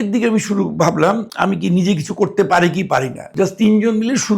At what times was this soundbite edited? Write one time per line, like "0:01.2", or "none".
0:03.2